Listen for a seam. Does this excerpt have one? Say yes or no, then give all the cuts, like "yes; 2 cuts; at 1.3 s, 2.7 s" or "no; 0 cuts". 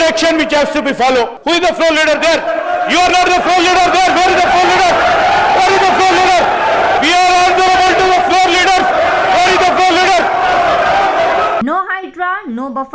yes; 3 cuts; at 1.4 s, 7.0 s, 11.6 s